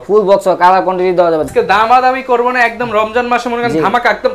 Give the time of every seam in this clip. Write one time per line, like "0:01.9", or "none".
0:01.5